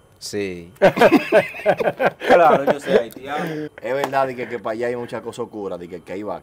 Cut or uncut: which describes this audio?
cut